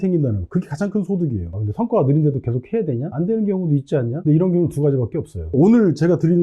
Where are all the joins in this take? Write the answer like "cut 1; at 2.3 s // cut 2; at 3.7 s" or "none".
cut 1; at 1.5 s // cut 2; at 4.2 s // cut 3; at 5.5 s